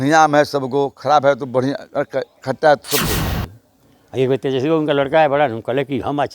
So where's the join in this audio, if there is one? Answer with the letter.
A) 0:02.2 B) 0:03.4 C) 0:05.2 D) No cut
B